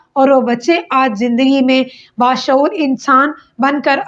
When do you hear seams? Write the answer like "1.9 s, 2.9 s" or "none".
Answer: none